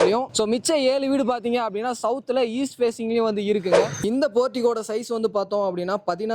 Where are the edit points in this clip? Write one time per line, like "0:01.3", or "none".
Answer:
0:03.8